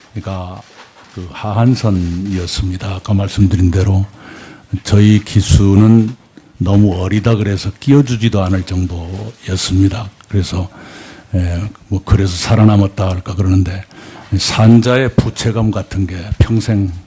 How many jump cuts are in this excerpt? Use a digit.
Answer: 1